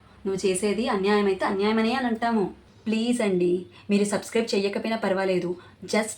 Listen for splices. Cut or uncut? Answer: cut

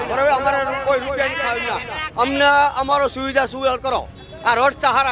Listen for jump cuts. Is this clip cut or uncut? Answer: uncut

